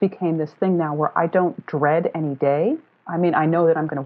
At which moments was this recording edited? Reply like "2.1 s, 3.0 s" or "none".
none